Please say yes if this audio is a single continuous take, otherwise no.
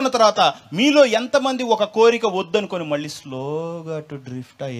yes